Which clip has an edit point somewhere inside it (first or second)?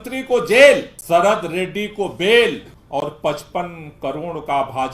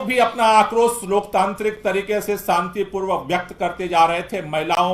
first